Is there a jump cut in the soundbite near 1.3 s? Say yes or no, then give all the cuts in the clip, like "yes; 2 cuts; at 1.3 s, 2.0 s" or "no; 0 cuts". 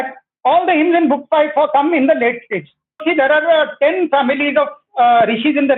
no; 1 cut; at 3.0 s